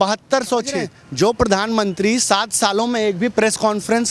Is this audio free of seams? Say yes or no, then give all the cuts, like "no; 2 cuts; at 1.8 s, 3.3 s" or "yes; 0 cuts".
no; 1 cut; at 1.0 s